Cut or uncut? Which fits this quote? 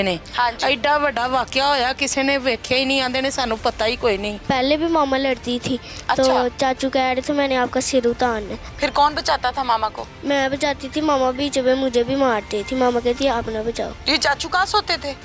cut